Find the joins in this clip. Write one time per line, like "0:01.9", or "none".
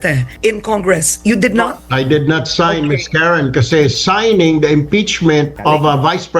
none